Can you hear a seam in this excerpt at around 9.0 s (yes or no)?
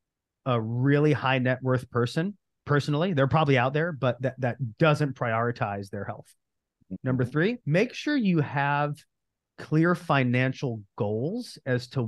no